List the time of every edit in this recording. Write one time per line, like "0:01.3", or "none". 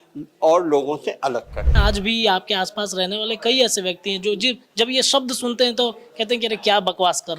0:01.8